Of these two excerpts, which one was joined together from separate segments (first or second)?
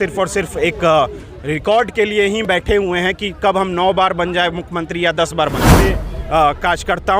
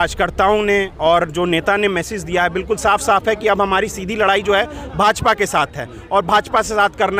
first